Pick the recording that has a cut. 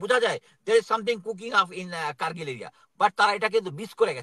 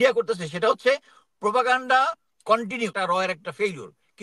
second; 1 cut; at 2.9 s

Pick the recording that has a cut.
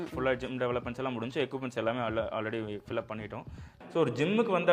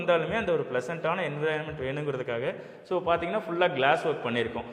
first; 1 cut; at 3.7 s

